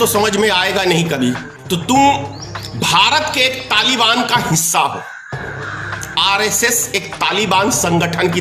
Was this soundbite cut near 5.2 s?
no; 1 cut; at 1.5 s

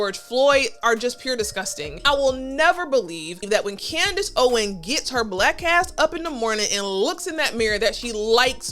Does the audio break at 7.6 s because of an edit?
no; 2 cuts; at 2.0 s, 3.4 s

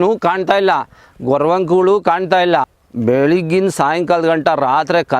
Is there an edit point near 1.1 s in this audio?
no; 1 cut; at 2.8 s

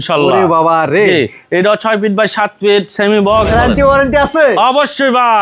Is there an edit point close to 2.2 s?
no; 1 cut; at 3.5 s

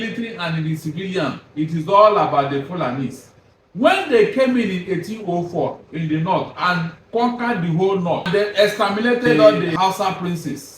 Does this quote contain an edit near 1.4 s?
no; 3 cuts; at 7.0 s, 8.2 s, 9.7 s

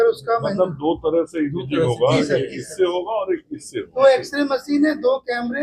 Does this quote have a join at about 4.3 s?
no; 0 cuts

